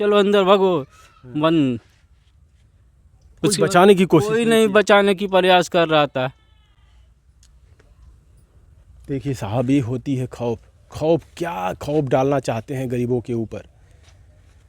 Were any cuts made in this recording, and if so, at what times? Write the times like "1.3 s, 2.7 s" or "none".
none